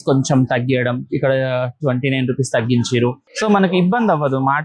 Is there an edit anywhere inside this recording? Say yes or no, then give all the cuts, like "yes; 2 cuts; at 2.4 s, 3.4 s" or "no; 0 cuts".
yes; 1 cut; at 3.3 s